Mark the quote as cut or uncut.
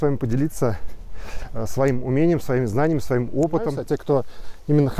cut